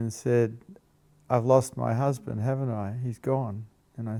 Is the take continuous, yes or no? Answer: yes